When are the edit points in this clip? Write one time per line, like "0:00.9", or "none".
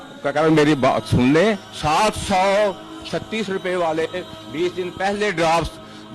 0:01.7